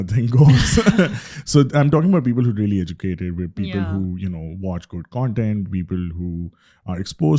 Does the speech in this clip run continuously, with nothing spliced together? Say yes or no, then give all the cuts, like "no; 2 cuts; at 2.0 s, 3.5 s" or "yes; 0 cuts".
yes; 0 cuts